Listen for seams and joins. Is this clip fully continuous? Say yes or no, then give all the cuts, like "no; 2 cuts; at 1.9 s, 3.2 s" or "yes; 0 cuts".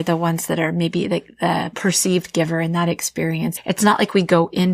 no; 2 cuts; at 1.7 s, 3.6 s